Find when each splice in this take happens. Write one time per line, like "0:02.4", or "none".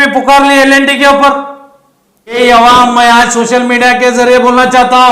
0:02.4